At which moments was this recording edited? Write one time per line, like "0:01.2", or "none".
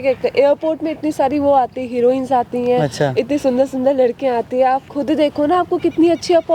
none